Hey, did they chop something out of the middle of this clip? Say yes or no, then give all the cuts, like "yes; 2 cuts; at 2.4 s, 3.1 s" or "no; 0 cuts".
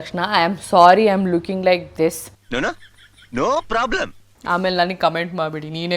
yes; 1 cut; at 4.3 s